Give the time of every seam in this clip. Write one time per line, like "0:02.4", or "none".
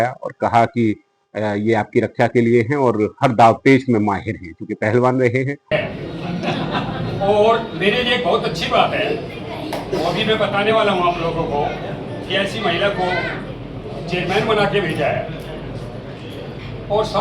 0:05.7